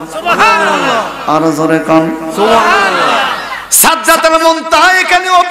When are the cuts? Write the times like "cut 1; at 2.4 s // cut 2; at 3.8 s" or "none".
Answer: none